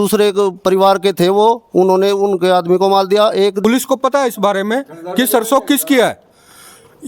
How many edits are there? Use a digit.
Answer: 1